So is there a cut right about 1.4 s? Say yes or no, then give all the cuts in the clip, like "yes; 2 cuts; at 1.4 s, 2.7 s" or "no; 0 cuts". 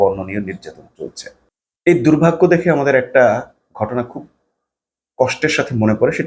no; 0 cuts